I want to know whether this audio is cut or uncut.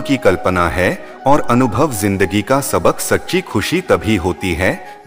uncut